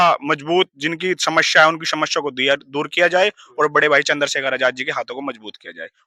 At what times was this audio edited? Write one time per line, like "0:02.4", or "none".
none